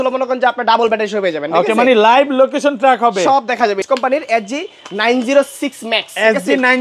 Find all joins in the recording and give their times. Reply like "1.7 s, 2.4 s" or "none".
3.8 s